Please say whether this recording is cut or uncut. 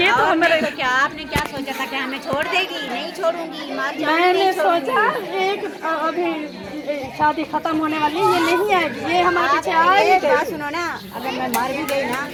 uncut